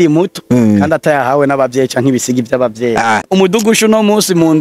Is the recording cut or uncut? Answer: cut